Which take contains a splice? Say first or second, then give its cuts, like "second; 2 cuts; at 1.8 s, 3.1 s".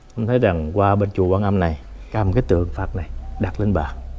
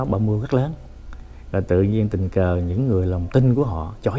first; 1 cut; at 2.2 s